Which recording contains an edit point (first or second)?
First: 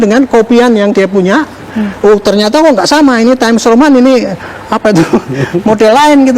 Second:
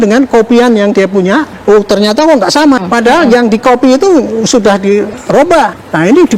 second